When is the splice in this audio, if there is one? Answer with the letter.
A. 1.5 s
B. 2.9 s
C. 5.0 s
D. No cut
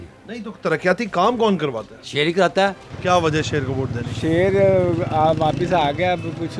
B